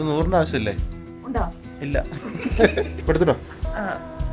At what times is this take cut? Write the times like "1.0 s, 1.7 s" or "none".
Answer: 3.0 s

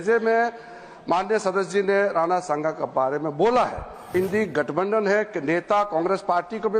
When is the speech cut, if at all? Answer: 4.1 s

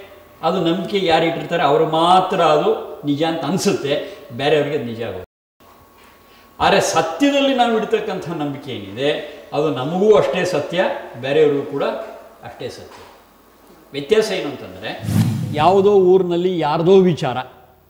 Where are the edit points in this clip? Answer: 15.4 s

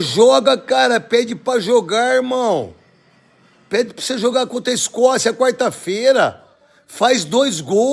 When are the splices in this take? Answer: none

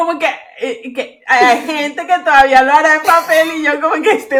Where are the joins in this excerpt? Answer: none

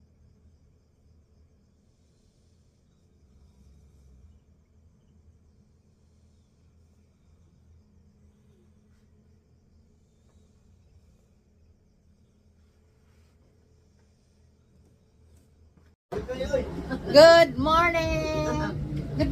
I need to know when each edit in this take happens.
16.0 s

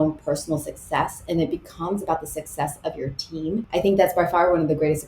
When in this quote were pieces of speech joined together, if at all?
3.6 s

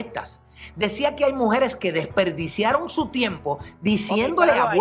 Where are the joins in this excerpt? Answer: none

